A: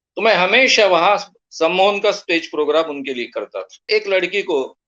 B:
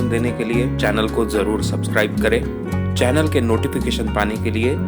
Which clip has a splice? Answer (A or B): A